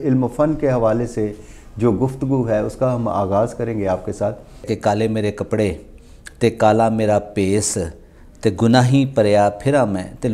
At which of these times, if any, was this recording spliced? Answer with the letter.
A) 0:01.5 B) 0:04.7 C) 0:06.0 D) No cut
B